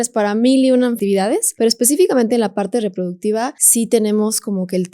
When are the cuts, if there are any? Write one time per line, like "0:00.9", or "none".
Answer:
0:01.1
0:03.6